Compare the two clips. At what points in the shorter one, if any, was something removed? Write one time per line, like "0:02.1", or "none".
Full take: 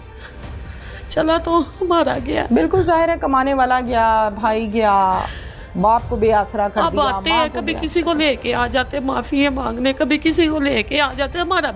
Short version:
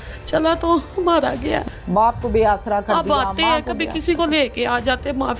0:01.6

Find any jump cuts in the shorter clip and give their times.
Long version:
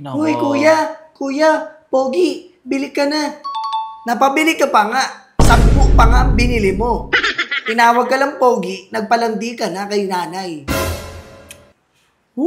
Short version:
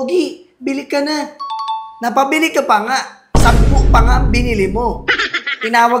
none

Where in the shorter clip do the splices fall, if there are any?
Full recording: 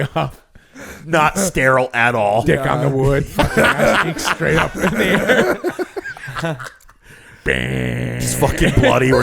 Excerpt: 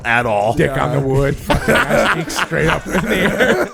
none

